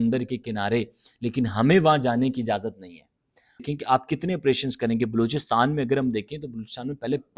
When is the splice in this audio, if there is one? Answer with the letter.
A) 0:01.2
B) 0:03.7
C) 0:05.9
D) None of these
B